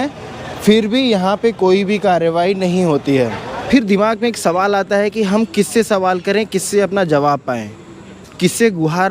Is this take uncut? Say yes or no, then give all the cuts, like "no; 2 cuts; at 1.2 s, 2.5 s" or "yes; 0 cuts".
no; 1 cut; at 3.5 s